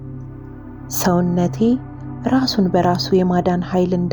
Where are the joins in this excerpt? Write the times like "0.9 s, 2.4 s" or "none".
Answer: none